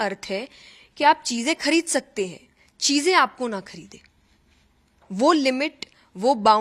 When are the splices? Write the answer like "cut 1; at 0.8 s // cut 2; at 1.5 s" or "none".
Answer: none